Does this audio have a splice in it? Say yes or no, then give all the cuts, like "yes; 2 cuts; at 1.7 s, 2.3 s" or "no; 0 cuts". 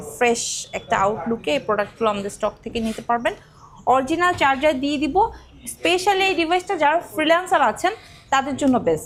no; 0 cuts